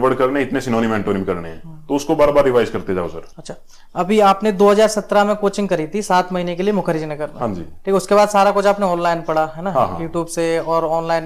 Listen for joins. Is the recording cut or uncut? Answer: uncut